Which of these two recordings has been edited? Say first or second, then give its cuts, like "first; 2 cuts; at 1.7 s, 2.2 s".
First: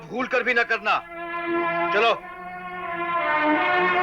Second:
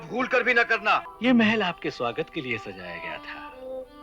second; 1 cut; at 1.1 s